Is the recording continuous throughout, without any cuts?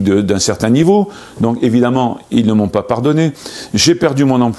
yes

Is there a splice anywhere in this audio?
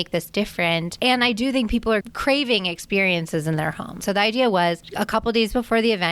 yes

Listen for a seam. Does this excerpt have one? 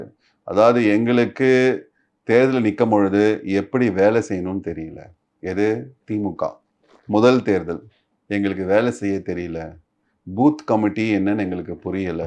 no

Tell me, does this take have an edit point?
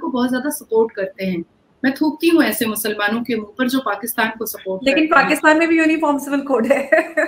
no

